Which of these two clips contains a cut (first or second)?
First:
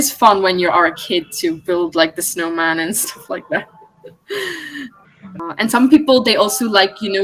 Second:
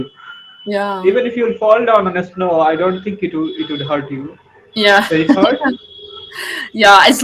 first